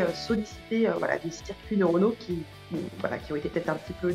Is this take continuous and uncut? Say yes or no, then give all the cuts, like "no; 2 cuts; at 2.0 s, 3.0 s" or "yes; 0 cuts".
yes; 0 cuts